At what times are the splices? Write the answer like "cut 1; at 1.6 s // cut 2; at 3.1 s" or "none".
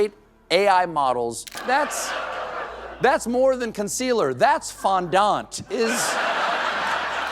cut 1; at 1.5 s